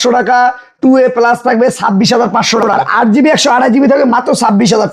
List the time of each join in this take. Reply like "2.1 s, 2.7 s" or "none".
2.7 s